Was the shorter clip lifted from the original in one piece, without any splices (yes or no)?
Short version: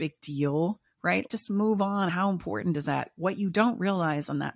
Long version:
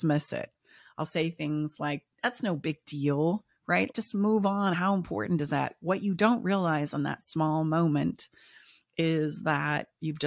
yes